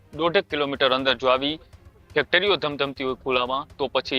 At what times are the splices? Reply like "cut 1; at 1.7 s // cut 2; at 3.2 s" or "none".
none